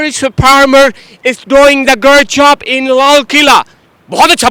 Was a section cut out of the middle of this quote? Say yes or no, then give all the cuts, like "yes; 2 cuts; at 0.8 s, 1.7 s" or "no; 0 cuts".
no; 0 cuts